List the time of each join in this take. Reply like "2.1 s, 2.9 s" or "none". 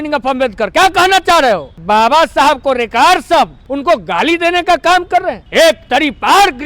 1.8 s, 3.7 s, 5.4 s